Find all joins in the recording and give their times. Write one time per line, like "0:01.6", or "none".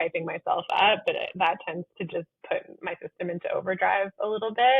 none